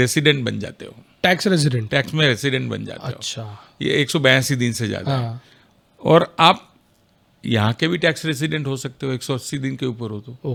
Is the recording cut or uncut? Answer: uncut